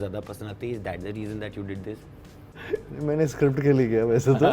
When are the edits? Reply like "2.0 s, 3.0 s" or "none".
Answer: 2.6 s

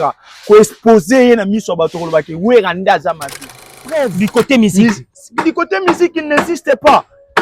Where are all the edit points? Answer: 3.8 s

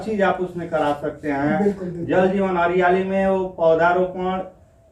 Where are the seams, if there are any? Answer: none

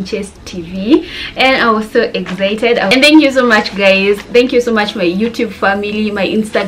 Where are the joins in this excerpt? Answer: 2.9 s

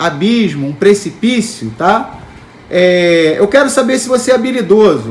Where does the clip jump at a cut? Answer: none

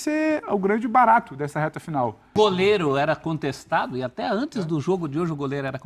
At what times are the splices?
2.3 s

